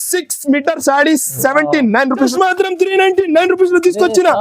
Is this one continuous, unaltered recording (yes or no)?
no